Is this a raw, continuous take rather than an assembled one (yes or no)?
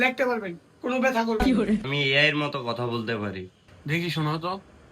no